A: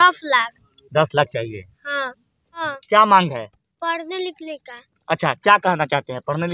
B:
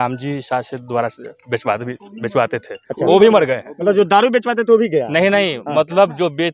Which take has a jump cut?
A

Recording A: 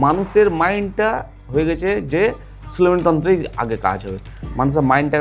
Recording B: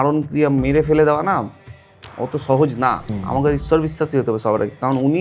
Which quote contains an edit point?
B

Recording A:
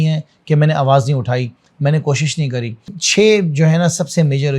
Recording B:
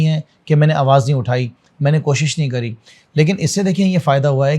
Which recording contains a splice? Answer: A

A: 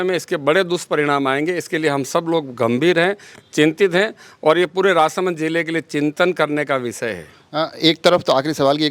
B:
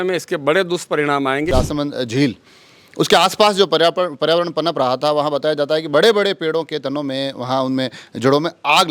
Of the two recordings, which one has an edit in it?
B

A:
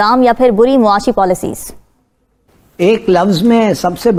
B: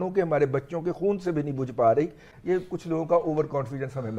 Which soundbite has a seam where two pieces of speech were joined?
B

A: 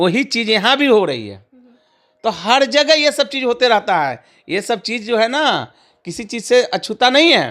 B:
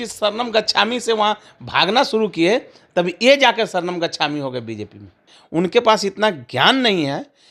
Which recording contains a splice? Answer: B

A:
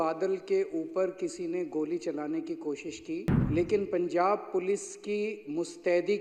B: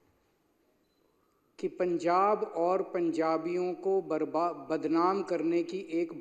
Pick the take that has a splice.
A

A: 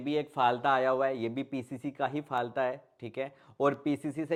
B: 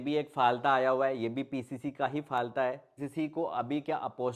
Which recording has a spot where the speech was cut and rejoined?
B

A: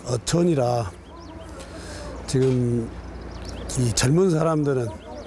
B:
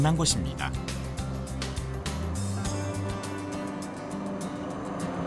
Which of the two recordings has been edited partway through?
A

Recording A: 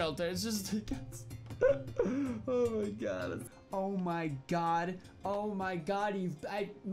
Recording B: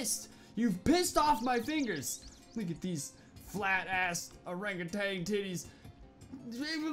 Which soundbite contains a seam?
A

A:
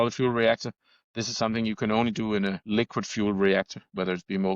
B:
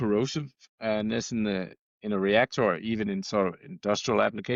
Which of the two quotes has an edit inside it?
A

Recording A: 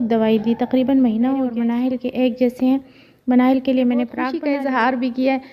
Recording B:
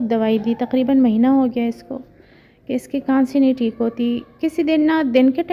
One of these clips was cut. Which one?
A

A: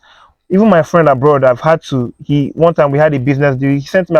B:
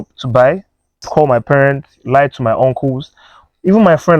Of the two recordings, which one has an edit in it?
B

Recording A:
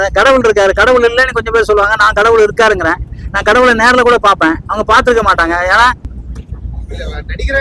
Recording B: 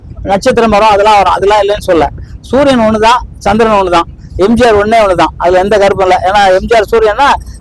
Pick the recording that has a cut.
A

